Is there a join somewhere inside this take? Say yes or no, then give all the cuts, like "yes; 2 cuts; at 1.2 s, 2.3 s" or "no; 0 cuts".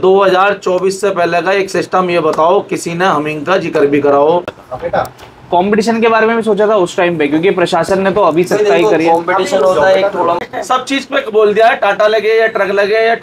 yes; 2 cuts; at 4.6 s, 10.4 s